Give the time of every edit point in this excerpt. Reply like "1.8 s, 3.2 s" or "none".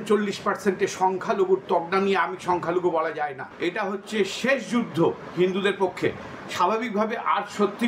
3.4 s